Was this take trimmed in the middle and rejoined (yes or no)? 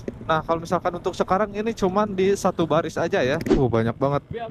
yes